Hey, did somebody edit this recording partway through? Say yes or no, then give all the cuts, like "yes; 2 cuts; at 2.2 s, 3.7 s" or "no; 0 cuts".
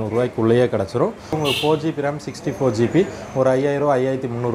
yes; 1 cut; at 1.4 s